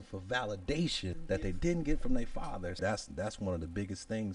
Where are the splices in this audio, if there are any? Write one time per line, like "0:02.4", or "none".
0:01.2
0:02.8